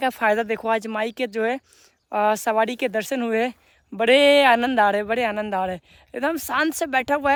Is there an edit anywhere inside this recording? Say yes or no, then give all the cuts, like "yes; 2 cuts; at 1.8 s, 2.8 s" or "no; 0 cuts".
no; 0 cuts